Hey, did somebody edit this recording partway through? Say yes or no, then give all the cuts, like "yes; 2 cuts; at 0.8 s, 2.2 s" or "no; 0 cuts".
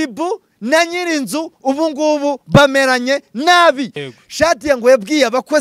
yes; 1 cut; at 4.0 s